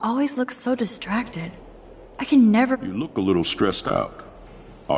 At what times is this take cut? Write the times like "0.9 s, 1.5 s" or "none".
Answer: 2.9 s